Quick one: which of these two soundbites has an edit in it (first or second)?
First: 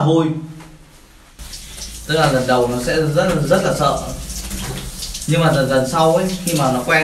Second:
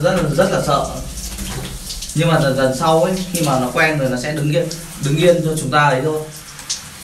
first